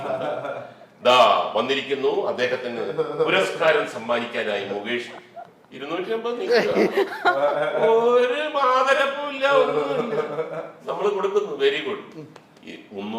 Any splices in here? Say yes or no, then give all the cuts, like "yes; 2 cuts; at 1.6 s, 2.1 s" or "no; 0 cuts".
no; 0 cuts